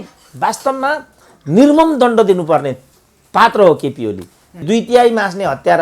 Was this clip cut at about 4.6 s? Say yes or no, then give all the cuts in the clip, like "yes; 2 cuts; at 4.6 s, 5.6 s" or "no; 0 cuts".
yes; 1 cut; at 4.6 s